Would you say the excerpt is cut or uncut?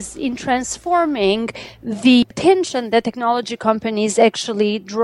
cut